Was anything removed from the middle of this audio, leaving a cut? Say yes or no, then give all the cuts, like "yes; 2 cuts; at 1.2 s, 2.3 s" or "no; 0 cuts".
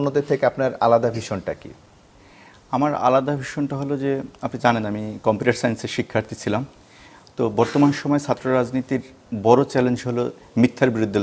no; 0 cuts